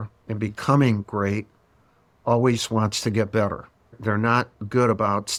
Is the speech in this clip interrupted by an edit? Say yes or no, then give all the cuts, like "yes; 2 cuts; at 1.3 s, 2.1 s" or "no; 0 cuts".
no; 0 cuts